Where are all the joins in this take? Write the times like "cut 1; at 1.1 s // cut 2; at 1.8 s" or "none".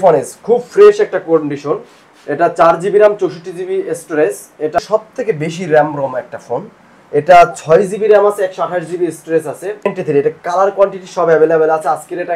cut 1; at 4.8 s // cut 2; at 9.9 s